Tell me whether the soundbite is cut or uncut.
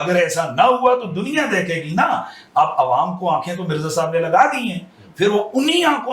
uncut